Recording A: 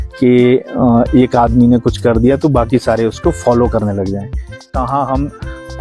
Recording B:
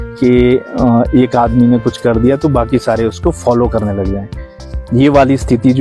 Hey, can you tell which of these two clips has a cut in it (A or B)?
A